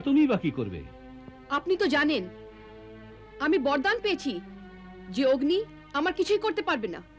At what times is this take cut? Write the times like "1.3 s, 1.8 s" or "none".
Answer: none